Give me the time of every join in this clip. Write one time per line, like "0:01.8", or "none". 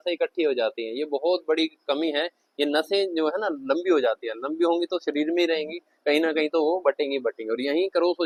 none